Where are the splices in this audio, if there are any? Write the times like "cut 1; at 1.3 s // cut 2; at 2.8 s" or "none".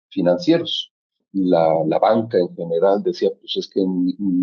cut 1; at 1.2 s